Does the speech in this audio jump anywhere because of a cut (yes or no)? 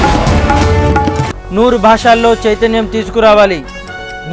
yes